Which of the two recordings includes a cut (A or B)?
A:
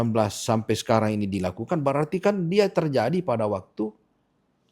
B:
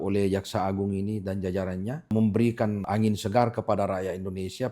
B